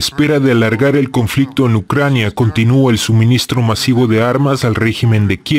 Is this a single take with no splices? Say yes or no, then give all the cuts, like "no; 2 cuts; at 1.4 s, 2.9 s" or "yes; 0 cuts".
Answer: yes; 0 cuts